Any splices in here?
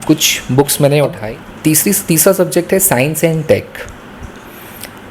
yes; 1 cut; at 1.2 s

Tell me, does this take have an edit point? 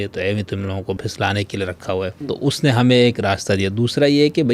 yes; 2 cuts; at 1.0 s, 2.2 s

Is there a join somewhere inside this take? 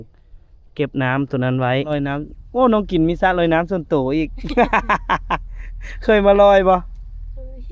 yes; 1 cut; at 1.9 s

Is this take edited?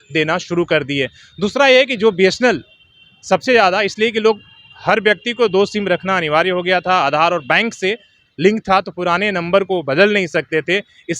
no; 0 cuts

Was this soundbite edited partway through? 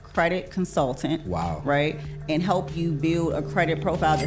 no; 0 cuts

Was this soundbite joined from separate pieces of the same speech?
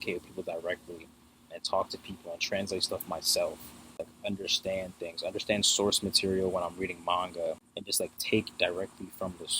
yes; 2 cuts; at 4.0 s, 7.7 s

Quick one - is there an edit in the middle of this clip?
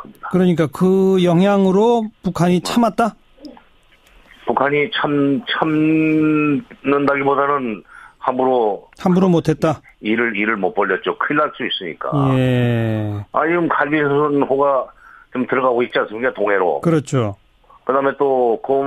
no; 0 cuts

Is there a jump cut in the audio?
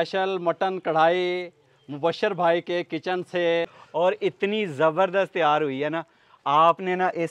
yes; 1 cut; at 3.7 s

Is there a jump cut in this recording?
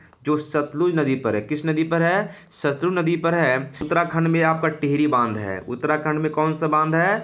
yes; 1 cut; at 3.9 s

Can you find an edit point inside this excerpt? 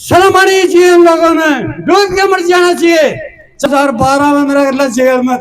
yes; 1 cut; at 3.7 s

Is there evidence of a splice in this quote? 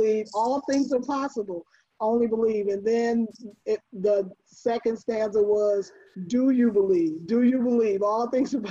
no; 0 cuts

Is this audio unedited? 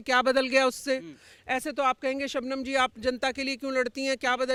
yes; 0 cuts

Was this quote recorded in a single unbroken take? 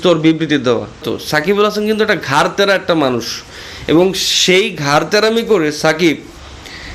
no; 1 cut; at 1.1 s

